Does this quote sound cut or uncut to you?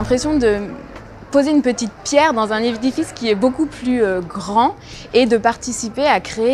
uncut